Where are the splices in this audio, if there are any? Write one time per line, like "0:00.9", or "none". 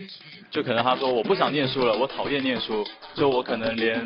none